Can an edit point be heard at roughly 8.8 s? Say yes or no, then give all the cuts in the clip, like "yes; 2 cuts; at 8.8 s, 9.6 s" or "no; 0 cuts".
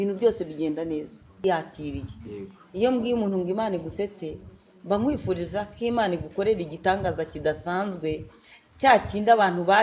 no; 1 cut; at 1.4 s